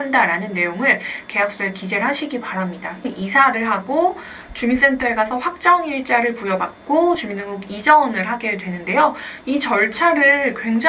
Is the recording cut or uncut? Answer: cut